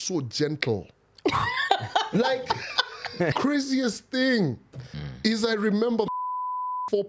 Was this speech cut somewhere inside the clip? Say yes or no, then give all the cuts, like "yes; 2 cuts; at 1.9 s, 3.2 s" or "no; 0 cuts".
yes; 1 cut; at 3.3 s